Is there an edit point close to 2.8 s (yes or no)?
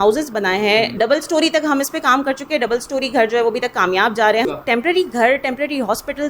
no